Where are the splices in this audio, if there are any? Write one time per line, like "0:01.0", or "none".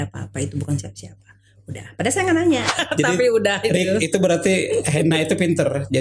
0:02.7